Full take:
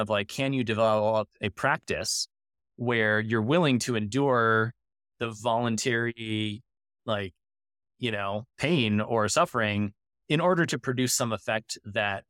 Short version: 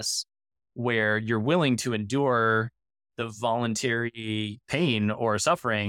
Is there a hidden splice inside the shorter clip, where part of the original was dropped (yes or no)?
yes